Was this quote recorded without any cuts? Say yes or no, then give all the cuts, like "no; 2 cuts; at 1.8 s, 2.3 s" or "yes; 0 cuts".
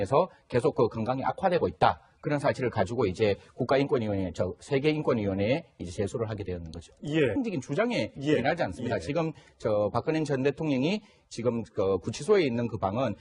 yes; 0 cuts